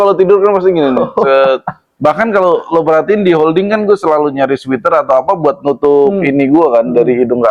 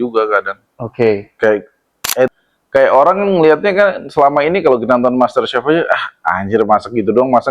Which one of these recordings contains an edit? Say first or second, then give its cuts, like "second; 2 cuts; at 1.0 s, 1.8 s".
second; 1 cut; at 2.3 s